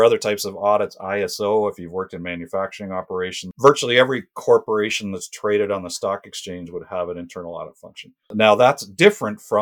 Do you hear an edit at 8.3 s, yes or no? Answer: yes